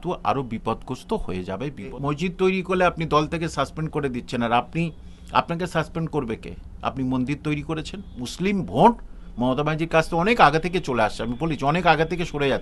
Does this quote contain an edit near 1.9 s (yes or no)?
yes